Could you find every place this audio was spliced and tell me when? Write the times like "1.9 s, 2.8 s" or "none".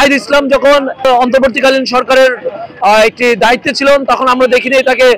1.1 s